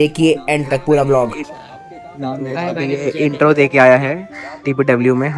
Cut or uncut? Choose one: uncut